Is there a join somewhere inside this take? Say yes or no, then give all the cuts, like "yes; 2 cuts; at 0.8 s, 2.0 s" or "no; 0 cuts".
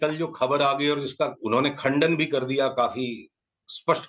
yes; 1 cut; at 1.4 s